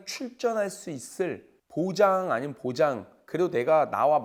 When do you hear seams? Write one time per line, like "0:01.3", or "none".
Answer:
none